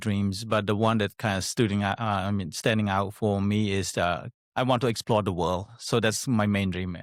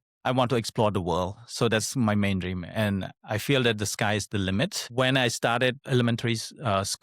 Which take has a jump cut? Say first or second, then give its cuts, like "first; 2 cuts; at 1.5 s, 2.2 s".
second; 2 cuts; at 4.8 s, 5.8 s